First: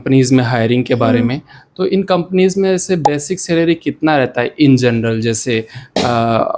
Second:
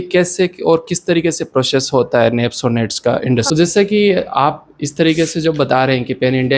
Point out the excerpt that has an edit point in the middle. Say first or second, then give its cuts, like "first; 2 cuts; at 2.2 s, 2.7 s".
second; 1 cut; at 3.5 s